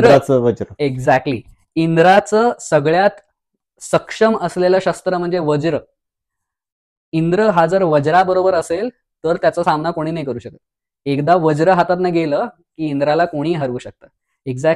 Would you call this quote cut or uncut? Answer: uncut